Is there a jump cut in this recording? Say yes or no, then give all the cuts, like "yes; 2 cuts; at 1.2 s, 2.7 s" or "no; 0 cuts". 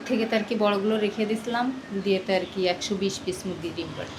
no; 0 cuts